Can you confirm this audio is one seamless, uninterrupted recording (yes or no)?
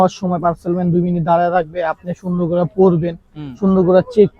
yes